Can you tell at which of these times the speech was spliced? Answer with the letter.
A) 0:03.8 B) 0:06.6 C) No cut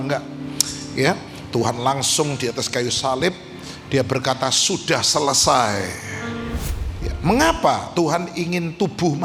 B